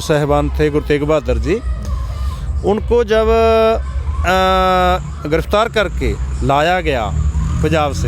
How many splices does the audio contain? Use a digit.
0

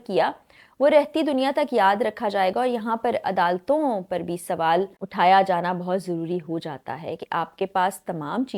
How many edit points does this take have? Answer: 1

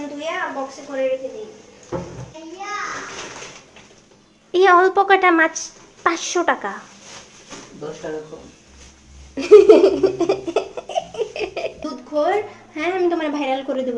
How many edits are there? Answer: 2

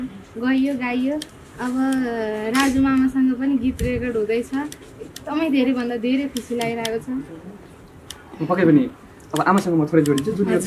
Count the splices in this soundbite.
0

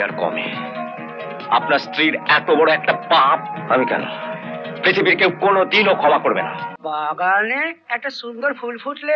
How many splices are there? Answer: 1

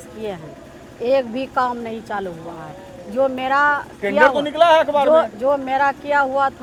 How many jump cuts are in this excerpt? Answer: 0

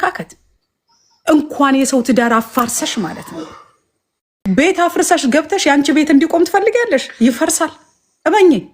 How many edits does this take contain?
1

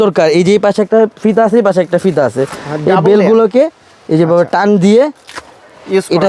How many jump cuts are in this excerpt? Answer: 0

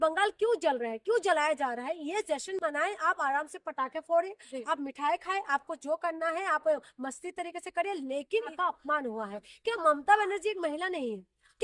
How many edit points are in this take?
1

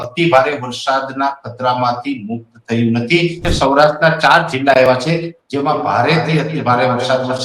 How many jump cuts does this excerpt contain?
1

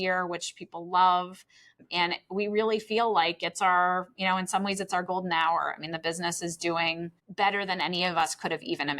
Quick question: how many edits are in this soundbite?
2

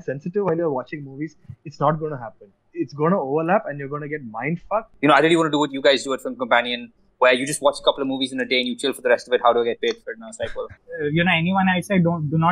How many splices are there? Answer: 2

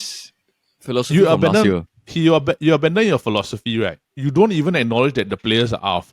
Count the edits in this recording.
1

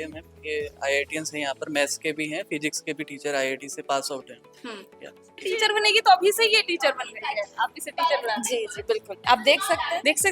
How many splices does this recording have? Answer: 1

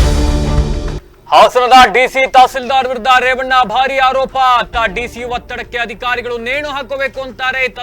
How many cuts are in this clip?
1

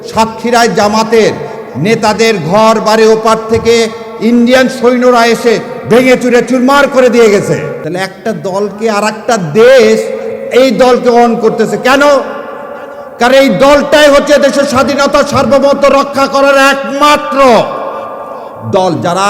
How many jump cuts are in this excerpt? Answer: 1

